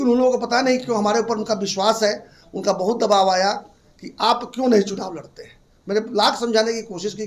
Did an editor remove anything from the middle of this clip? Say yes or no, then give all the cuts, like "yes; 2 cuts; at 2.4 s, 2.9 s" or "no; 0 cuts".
no; 0 cuts